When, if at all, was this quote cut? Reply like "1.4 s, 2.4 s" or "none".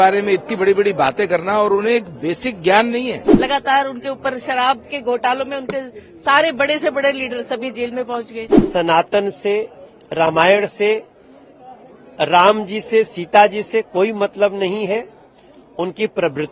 3.3 s, 8.6 s